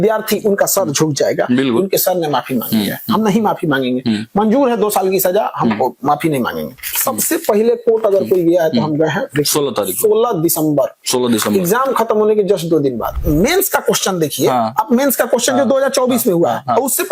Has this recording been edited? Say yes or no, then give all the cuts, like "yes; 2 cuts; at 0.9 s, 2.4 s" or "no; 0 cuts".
yes; 2 cuts; at 6.8 s, 13.1 s